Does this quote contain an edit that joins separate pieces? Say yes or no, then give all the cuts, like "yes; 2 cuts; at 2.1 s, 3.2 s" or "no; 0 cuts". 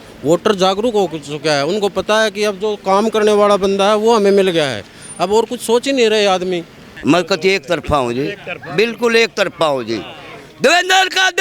yes; 1 cut; at 6.8 s